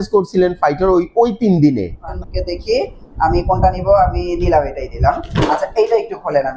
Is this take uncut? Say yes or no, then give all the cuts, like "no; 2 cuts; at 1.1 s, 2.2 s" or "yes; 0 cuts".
no; 1 cut; at 2.1 s